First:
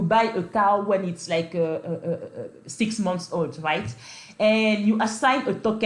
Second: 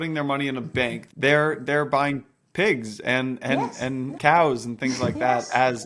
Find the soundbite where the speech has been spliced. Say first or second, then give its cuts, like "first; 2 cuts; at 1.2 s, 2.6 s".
second; 2 cuts; at 1.0 s, 4.1 s